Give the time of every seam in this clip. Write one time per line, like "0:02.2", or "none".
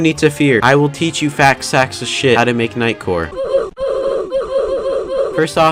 none